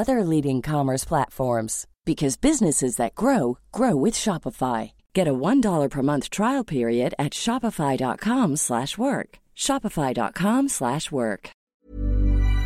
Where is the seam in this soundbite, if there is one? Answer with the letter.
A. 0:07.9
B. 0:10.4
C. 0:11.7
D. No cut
C